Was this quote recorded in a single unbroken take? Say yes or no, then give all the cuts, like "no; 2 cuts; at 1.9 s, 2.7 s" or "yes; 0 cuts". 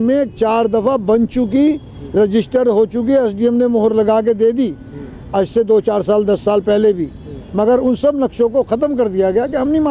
yes; 0 cuts